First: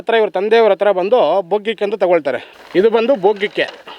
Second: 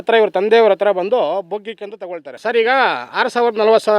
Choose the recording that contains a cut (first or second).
second